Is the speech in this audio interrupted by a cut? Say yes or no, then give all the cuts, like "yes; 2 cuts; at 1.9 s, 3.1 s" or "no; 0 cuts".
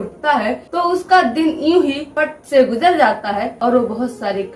yes; 2 cuts; at 2.1 s, 3.5 s